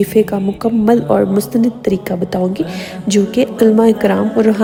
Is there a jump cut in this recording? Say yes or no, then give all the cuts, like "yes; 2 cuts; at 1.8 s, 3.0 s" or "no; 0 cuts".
no; 0 cuts